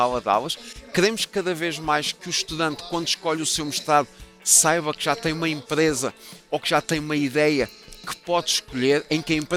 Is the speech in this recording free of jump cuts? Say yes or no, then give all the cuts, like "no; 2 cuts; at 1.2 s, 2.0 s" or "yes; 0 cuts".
yes; 0 cuts